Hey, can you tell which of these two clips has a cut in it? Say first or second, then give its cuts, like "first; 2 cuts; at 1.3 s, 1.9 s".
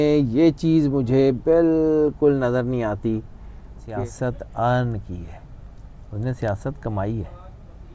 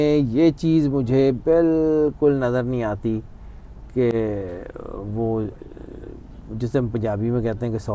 first; 1 cut; at 3.8 s